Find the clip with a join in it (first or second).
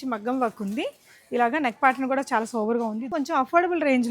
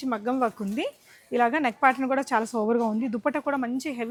first